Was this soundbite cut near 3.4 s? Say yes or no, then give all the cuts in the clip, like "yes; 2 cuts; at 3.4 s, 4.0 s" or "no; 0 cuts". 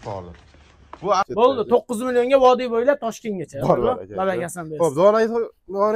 no; 1 cut; at 1.2 s